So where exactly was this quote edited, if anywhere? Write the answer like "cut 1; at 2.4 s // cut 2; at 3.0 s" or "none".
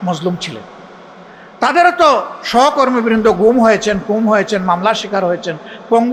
none